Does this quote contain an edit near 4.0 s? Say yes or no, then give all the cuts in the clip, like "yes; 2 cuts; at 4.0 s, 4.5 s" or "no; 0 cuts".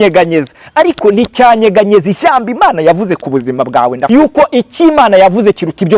yes; 1 cut; at 4.0 s